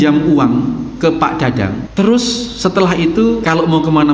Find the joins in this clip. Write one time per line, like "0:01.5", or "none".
0:01.8
0:03.4

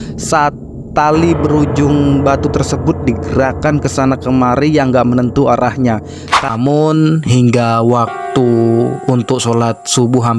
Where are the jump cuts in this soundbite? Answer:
0:06.4

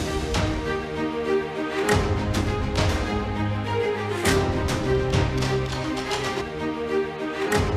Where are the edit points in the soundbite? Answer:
0:02.8
0:06.4

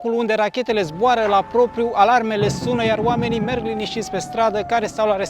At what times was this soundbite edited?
none

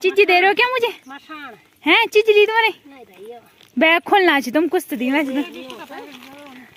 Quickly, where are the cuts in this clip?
none

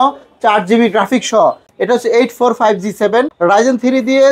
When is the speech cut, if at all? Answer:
0:01.7
0:03.3

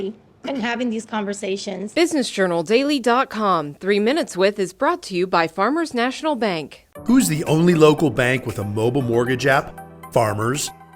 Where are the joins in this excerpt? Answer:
0:01.8

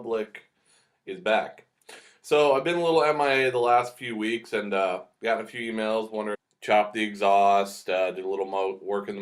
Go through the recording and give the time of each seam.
none

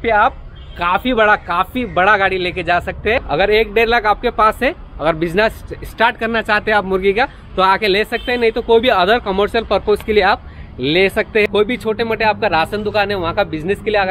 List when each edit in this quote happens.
0:03.2
0:11.5

